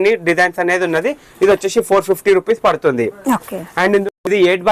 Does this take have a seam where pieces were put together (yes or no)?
no